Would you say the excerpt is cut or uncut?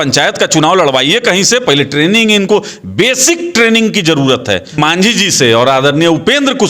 cut